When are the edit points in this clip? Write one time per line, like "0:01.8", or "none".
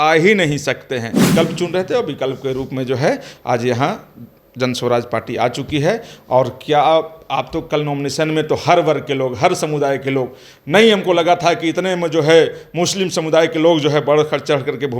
0:01.2